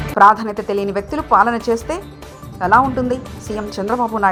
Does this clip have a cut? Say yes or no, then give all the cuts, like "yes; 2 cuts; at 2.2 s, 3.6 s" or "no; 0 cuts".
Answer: no; 0 cuts